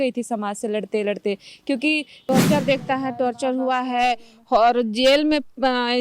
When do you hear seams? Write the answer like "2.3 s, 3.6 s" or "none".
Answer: 2.3 s